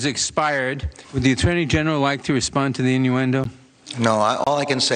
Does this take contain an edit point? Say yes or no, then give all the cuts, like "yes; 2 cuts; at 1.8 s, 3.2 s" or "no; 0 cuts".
no; 0 cuts